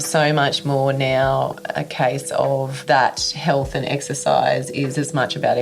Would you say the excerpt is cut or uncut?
cut